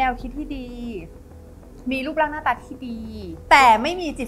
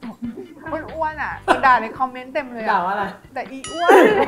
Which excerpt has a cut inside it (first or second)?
second